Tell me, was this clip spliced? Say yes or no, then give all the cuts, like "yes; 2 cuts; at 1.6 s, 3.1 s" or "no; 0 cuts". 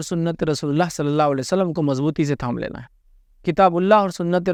no; 0 cuts